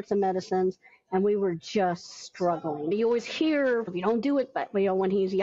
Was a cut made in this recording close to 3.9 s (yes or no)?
yes